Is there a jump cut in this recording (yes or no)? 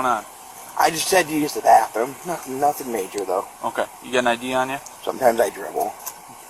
yes